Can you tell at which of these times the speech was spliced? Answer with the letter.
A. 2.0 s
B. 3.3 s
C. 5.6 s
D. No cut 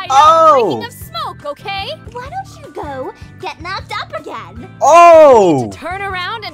A